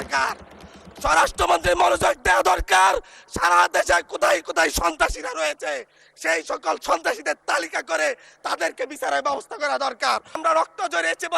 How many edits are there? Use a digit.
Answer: 1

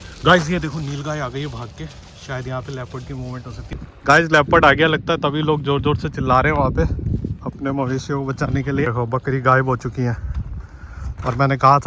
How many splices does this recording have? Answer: 2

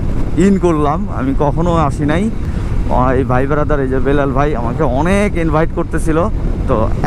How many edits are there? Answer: 0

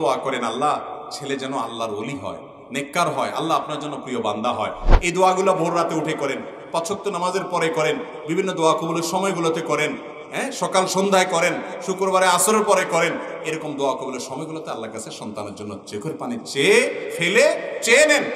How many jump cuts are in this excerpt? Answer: 1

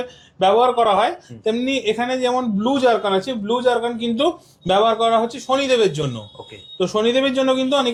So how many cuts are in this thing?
0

